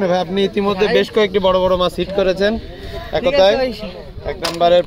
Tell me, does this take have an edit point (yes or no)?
no